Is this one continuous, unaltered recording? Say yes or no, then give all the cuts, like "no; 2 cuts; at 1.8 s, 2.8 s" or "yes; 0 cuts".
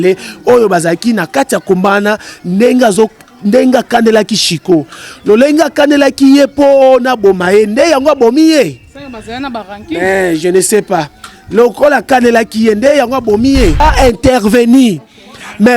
no; 1 cut; at 13.8 s